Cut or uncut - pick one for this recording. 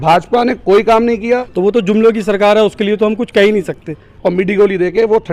cut